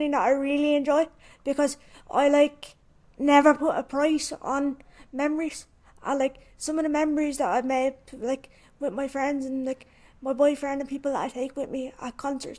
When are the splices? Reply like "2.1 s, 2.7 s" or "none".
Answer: none